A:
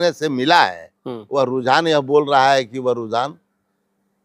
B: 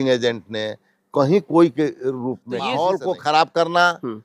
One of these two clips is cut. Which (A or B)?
B